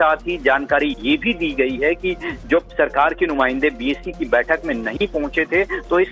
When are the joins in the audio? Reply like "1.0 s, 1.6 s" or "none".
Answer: none